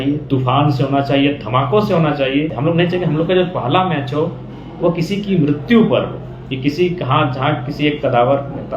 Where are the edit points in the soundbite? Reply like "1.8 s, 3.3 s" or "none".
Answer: 2.5 s